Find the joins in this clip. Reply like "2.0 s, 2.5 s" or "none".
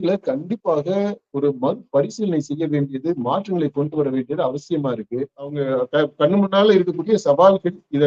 5.6 s